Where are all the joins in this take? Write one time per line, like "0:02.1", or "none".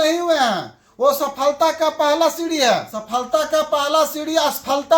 0:02.9